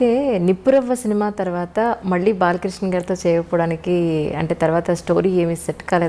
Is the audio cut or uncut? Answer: uncut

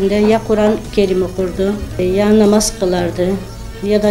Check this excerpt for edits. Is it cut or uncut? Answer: cut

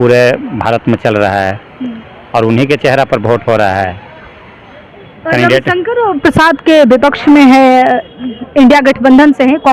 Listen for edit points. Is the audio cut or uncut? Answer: uncut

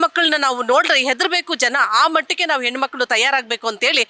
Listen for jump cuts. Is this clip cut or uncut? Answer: uncut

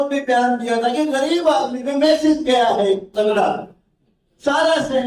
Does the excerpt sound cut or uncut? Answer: uncut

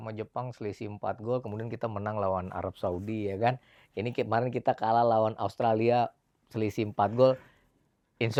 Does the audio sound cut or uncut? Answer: uncut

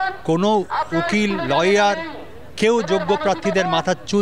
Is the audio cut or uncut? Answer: uncut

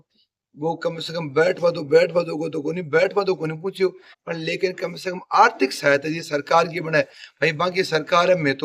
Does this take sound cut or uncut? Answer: uncut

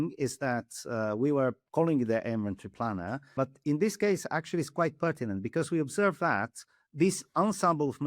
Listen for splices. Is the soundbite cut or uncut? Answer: cut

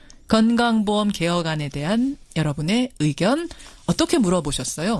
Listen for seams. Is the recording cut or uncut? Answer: cut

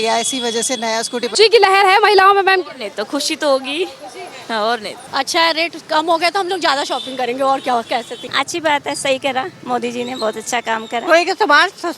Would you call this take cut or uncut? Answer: cut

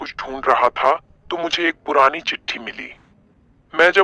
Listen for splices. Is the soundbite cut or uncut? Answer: uncut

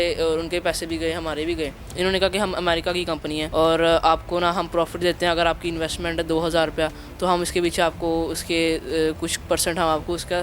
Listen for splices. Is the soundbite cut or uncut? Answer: cut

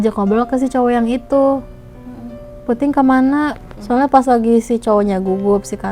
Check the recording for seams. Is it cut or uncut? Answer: cut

